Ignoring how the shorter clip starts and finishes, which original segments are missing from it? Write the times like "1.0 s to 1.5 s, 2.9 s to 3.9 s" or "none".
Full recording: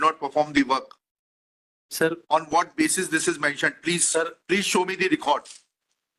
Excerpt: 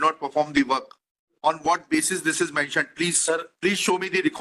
1.3 s to 2.2 s